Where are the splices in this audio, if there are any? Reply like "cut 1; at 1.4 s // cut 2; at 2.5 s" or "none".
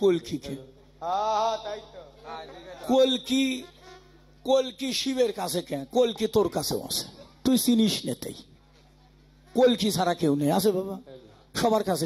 none